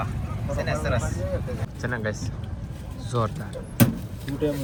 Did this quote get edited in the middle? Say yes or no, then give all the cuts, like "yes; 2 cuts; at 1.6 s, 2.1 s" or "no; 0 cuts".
no; 0 cuts